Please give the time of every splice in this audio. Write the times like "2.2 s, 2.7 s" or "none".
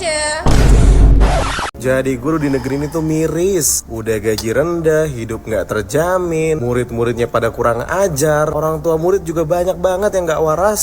1.3 s